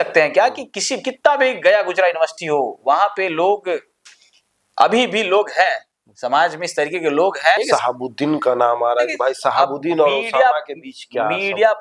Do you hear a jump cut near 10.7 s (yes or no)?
no